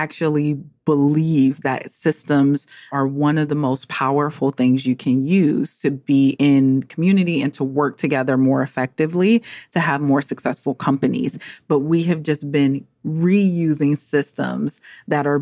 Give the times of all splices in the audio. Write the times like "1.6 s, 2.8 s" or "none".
2.9 s, 6.3 s